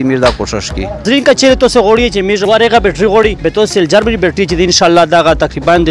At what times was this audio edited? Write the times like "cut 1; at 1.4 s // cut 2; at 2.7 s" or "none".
cut 1; at 1.0 s // cut 2; at 2.4 s // cut 3; at 3.4 s